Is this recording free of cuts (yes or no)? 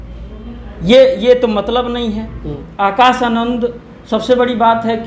no